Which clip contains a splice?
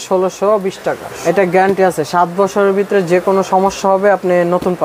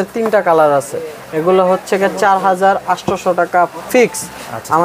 first; 1 cut; at 1.2 s

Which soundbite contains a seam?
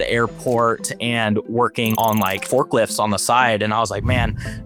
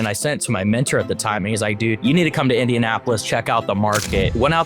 second; 1 cut; at 2.0 s

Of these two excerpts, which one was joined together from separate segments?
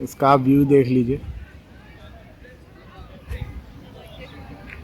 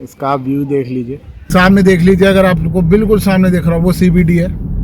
second; 1 cut; at 1.4 s

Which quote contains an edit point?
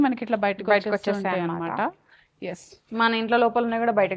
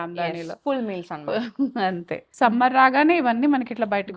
second; 1 cut; at 2.2 s

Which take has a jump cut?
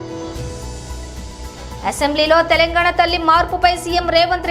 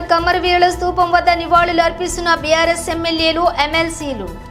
first; 1 cut; at 1.3 s

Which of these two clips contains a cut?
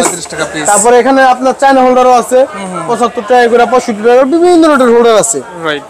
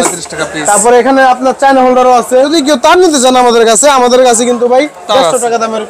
second; 1 cut; at 2.5 s

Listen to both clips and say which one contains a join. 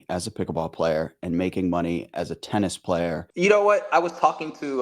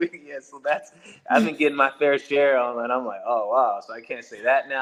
first; 1 cut; at 3.2 s

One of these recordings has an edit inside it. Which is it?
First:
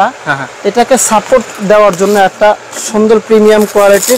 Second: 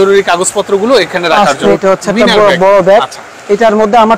second; 1 cut; at 1.7 s

